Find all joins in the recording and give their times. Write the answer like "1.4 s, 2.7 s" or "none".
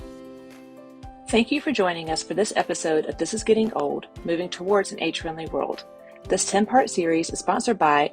1.3 s